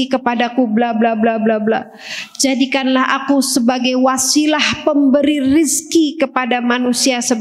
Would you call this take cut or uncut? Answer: uncut